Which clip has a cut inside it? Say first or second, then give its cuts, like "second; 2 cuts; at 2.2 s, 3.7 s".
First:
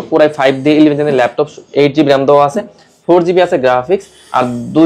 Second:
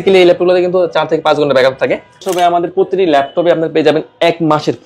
second; 1 cut; at 2.2 s